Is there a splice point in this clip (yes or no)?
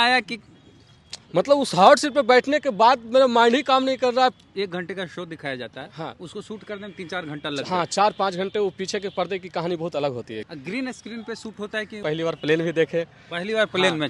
yes